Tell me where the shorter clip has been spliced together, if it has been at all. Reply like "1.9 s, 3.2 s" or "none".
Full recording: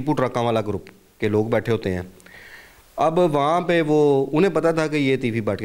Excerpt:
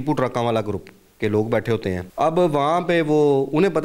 2.1 s